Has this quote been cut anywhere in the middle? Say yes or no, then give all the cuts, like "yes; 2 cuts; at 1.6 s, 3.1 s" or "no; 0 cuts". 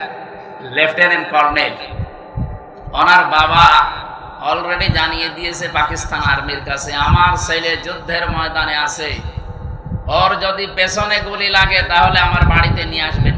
no; 0 cuts